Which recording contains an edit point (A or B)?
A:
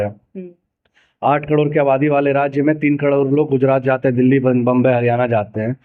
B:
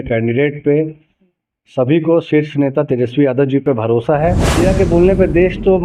B